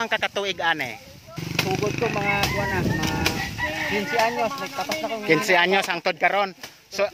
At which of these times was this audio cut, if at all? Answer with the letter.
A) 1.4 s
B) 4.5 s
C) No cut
A